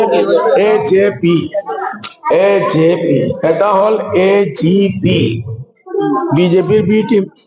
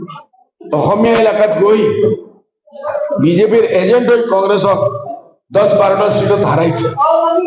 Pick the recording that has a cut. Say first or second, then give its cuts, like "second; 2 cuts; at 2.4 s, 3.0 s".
first; 2 cuts; at 1.8 s, 3.3 s